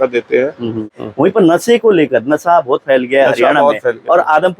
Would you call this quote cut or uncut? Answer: cut